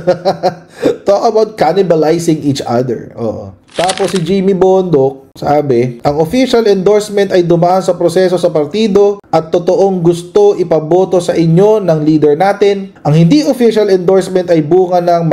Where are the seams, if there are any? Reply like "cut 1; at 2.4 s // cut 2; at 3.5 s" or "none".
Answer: none